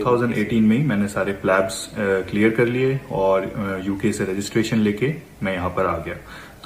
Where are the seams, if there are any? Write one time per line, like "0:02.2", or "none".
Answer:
none